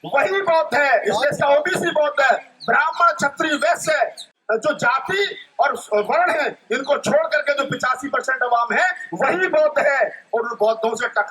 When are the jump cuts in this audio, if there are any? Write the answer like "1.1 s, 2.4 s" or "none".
4.3 s